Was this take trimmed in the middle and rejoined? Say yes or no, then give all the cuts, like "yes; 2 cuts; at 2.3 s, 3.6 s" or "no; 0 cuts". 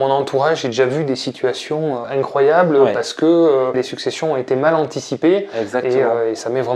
yes; 2 cuts; at 2.0 s, 3.8 s